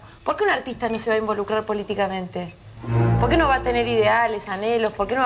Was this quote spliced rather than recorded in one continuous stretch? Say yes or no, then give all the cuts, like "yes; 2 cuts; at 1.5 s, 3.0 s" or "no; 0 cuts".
no; 0 cuts